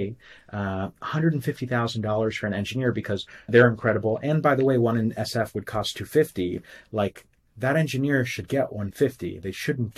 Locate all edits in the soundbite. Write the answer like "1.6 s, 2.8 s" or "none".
3.5 s